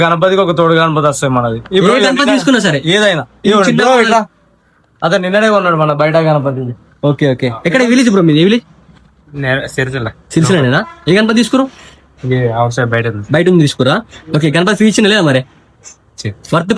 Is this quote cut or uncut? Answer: uncut